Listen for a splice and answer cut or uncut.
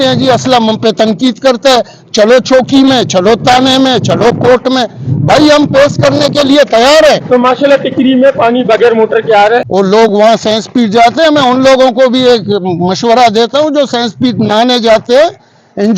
cut